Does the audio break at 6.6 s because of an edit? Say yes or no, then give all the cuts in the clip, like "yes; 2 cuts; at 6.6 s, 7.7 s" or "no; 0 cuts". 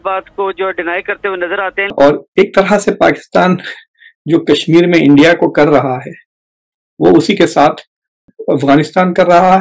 no; 2 cuts; at 1.8 s, 8.3 s